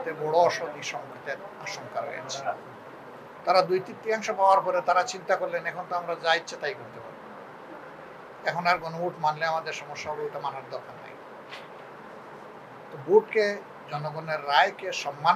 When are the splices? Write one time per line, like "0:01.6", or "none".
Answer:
0:03.2

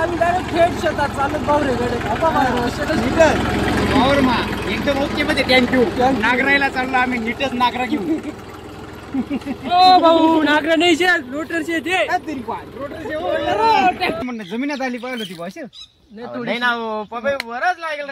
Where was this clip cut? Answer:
0:14.2

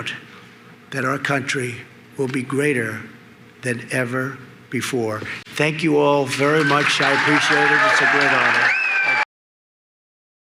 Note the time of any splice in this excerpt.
none

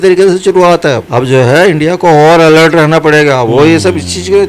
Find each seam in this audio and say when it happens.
0:01.0

